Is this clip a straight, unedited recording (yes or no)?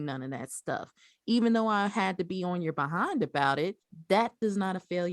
no